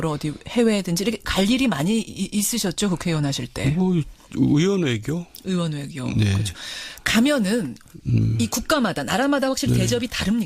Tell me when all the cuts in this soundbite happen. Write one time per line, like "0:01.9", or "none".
0:08.3